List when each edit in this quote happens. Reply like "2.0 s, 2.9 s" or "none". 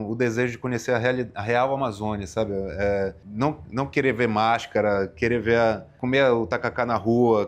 3.2 s, 5.9 s

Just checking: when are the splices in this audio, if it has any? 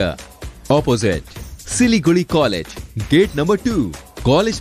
none

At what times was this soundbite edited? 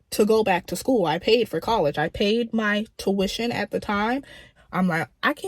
4.5 s

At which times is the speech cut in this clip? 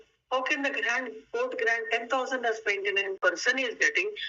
3.2 s

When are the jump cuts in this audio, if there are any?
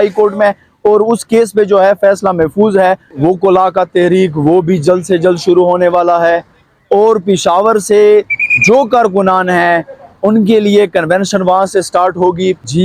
3.1 s

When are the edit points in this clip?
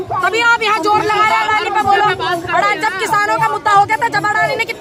none

